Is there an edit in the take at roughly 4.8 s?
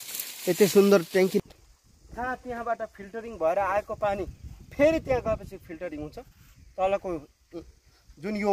no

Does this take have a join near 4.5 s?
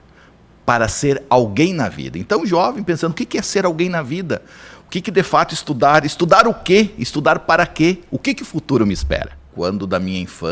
no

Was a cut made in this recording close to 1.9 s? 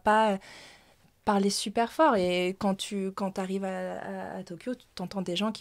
no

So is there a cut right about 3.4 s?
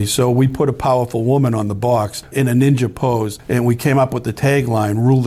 yes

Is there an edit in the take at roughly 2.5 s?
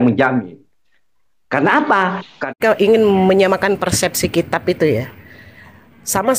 yes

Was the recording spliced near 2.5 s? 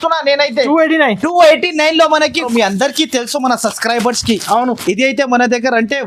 yes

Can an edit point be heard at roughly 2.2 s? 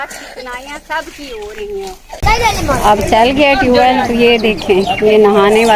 yes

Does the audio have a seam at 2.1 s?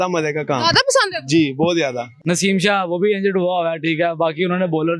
yes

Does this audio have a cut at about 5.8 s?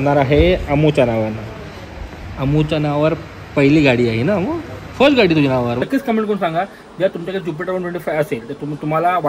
yes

